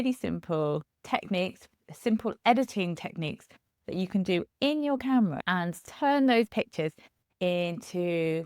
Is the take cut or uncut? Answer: cut